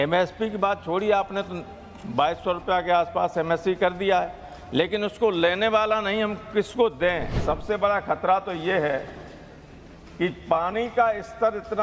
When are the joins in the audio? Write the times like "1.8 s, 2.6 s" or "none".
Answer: 7.4 s